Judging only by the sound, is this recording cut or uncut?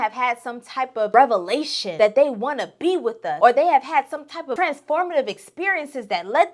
cut